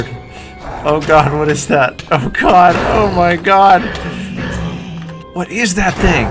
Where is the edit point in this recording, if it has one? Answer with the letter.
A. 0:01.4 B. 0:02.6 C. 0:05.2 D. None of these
C